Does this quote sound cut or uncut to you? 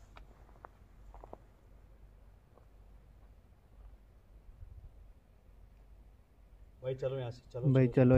uncut